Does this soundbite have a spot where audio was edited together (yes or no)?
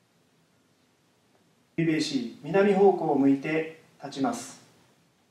yes